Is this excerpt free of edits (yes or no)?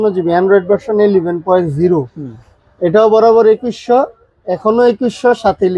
yes